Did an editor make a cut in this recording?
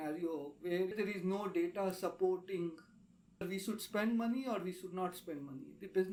no; 0 cuts

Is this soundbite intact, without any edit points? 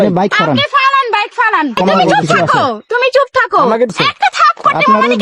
no; 2 cuts; at 1.8 s, 4.0 s

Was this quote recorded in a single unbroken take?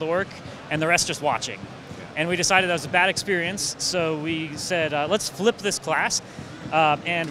no; 1 cut; at 6.2 s

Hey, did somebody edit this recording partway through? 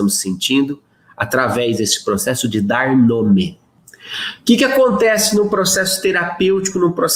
no; 0 cuts

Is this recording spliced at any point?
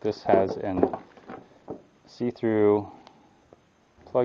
no; 0 cuts

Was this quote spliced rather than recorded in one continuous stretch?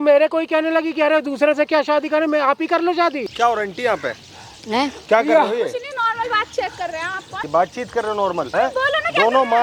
yes; 3 cuts; at 3.2 s, 7.4 s, 8.5 s

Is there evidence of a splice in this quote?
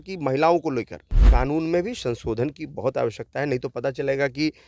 yes; 1 cut; at 1.2 s

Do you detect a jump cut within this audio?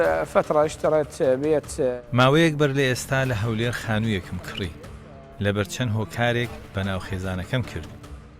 yes; 1 cut; at 1.9 s

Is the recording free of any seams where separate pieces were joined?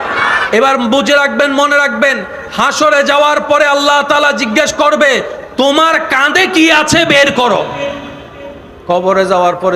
yes; 0 cuts

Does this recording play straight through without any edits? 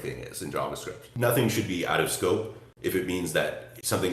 no; 1 cut; at 1.1 s

